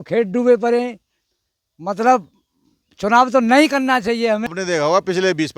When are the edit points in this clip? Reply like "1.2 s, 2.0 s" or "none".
4.6 s

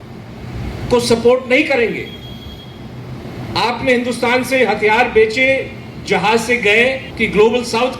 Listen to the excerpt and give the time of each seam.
7.1 s

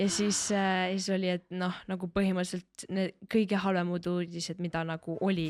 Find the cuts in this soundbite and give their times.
none

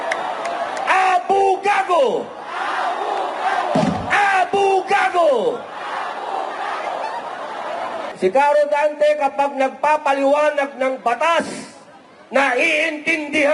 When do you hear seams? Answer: 8.1 s

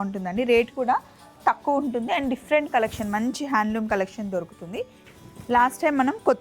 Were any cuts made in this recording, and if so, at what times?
5.0 s

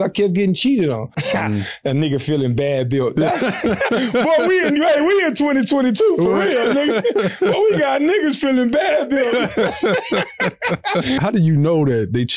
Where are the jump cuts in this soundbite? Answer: 1.2 s, 11.2 s

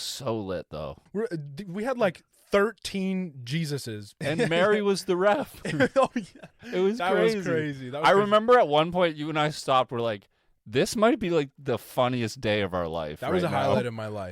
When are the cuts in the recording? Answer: 1.0 s, 4.1 s

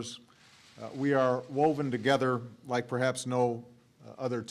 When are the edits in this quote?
2.5 s

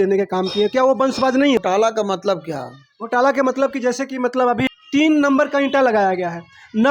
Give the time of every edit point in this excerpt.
1.6 s, 4.7 s

